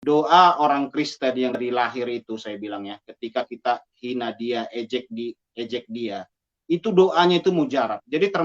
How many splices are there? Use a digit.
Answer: 1